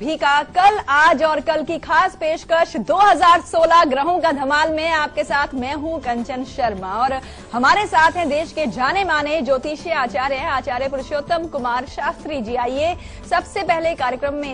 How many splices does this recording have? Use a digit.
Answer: 1